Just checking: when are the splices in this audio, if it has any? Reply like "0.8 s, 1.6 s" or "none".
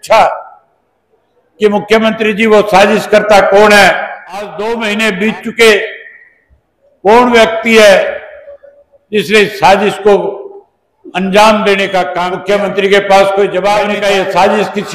4.5 s, 12.2 s, 14.0 s